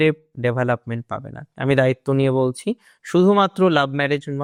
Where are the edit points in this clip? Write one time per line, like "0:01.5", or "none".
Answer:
none